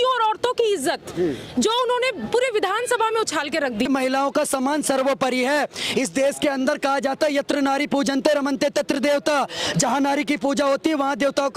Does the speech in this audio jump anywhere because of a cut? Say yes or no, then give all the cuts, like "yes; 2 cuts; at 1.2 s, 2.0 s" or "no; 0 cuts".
yes; 1 cut; at 3.9 s